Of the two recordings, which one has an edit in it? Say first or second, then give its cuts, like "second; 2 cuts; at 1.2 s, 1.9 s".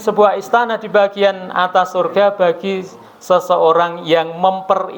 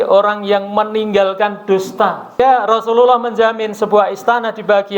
second; 1 cut; at 2.3 s